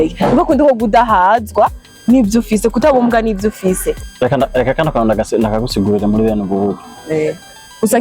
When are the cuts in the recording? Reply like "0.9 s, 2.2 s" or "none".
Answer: 4.1 s